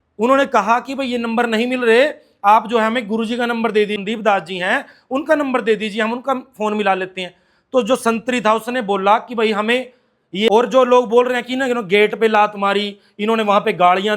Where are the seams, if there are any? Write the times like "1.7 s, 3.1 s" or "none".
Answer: 10.5 s